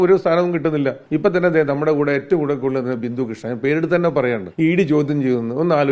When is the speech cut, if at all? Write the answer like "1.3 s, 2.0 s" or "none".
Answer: 1.0 s, 4.5 s